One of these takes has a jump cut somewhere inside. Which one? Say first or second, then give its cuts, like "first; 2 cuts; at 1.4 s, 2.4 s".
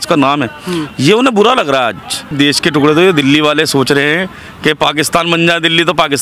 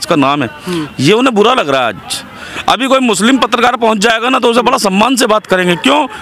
first; 1 cut; at 2.3 s